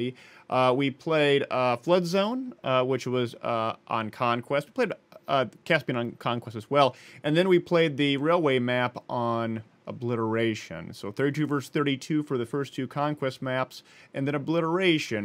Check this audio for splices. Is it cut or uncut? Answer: uncut